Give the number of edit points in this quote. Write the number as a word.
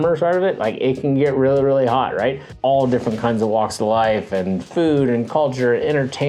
one